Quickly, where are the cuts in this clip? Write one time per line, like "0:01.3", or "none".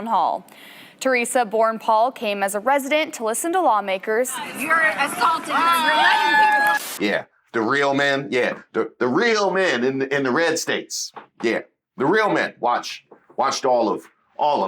0:04.4
0:06.8